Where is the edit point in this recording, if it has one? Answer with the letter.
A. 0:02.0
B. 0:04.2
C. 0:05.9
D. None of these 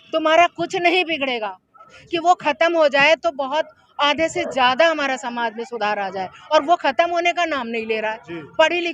A